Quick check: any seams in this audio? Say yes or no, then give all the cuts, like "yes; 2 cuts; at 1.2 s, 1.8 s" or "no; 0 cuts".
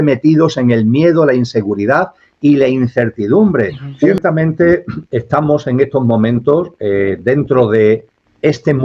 yes; 1 cut; at 4.2 s